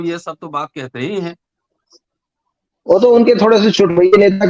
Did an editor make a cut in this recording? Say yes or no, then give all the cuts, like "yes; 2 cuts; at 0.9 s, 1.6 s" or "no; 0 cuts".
no; 0 cuts